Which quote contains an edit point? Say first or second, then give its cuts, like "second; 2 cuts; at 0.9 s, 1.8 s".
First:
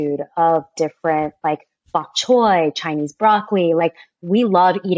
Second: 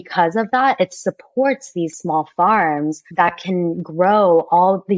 second; 2 cuts; at 1.9 s, 3.1 s